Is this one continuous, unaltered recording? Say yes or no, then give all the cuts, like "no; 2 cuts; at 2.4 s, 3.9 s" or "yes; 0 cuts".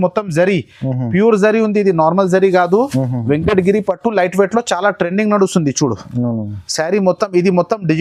yes; 0 cuts